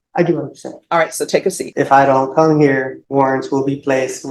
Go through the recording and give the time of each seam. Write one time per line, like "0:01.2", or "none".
0:01.6
0:03.0

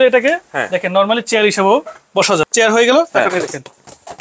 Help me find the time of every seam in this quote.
0:02.4

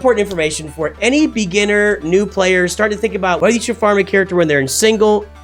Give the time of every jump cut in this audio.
0:01.0
0:03.4

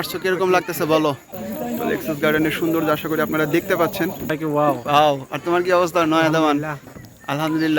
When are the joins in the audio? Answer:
0:01.4
0:04.3

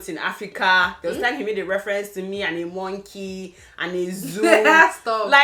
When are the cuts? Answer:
none

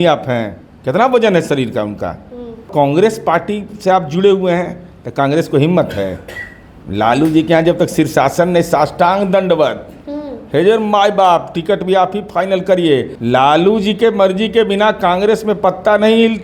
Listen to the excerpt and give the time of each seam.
0:02.7
0:13.1

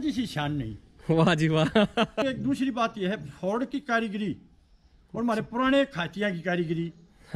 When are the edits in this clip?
0:02.2

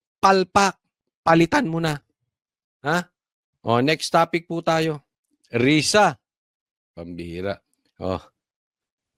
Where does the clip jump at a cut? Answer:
none

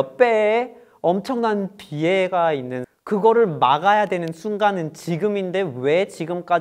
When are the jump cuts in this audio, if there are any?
0:02.8

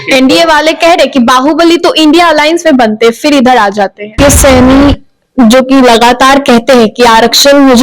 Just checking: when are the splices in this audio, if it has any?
0:04.2

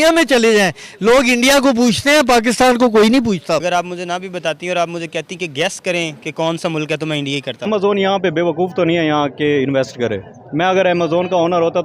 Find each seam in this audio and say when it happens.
0:03.6
0:07.7

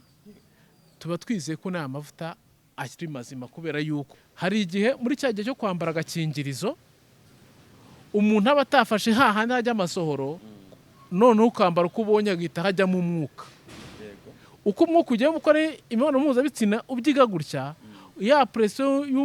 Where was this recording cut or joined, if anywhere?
0:04.1

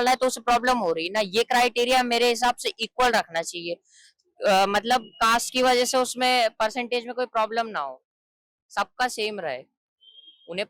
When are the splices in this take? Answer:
none

